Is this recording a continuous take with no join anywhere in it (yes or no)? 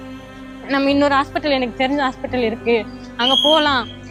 yes